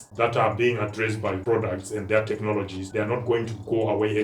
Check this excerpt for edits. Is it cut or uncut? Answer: cut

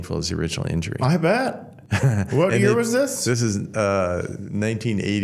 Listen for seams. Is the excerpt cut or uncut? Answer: uncut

